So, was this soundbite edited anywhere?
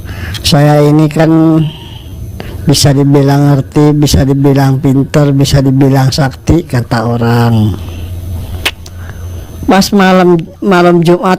no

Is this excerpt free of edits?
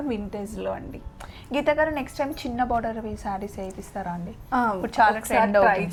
yes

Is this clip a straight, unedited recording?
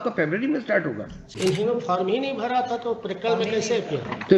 no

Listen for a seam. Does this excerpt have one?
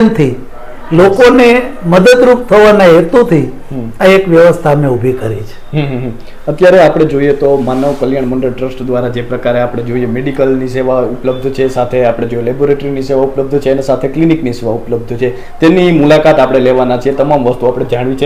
no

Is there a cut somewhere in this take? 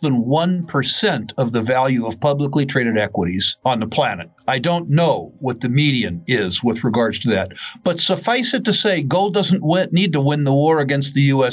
yes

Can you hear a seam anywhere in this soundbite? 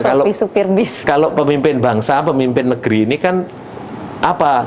yes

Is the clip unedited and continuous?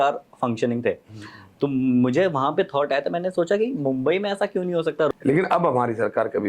no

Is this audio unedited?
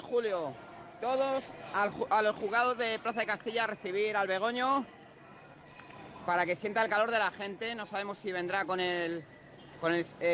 yes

